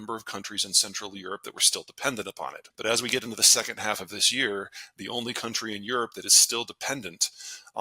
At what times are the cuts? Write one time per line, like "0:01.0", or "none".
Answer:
0:02.6